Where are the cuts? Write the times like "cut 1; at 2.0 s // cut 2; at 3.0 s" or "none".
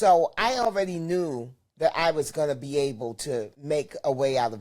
cut 1; at 3.5 s

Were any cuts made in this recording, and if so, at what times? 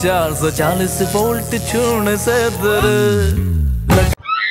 none

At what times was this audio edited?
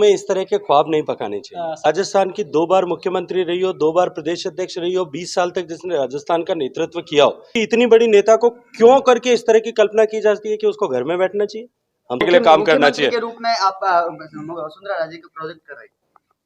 cut 1; at 1.8 s // cut 2; at 7.5 s // cut 3; at 12.2 s

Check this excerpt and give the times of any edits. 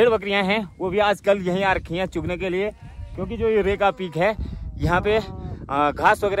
none

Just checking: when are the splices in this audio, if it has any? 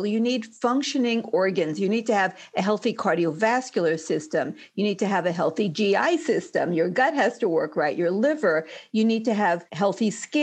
none

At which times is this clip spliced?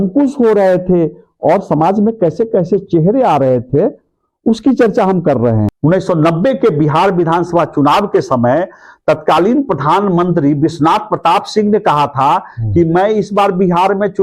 cut 1; at 5.7 s

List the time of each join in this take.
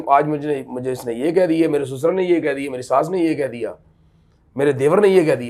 none

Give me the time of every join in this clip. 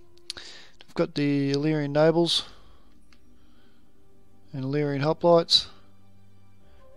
cut 1; at 1.5 s

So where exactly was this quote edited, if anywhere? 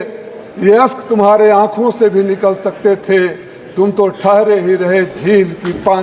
none

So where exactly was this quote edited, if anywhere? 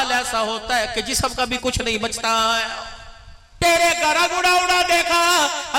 cut 1; at 3.5 s

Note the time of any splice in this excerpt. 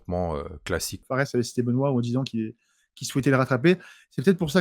cut 1; at 1.0 s

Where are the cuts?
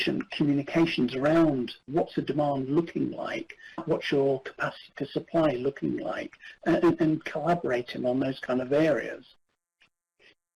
none

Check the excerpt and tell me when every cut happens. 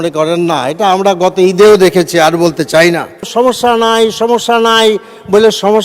cut 1; at 3.3 s

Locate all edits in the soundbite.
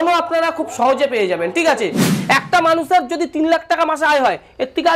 cut 1; at 2.1 s

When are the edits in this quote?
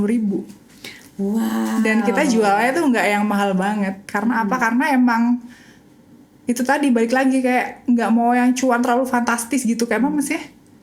none

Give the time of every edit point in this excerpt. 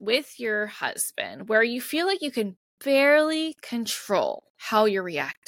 cut 1; at 4.5 s

